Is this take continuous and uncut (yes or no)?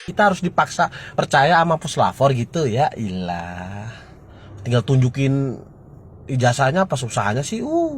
no